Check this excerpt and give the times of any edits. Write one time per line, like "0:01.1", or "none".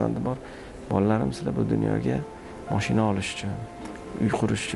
none